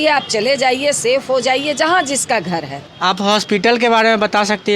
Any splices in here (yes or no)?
yes